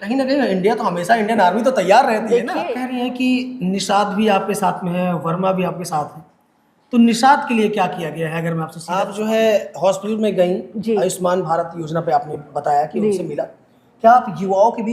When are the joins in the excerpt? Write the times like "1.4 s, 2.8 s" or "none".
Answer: 2.8 s, 8.8 s